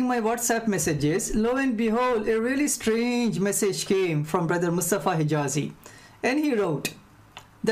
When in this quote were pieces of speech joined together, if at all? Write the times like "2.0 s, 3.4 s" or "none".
4.4 s, 5.7 s